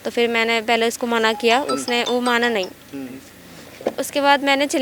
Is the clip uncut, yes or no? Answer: yes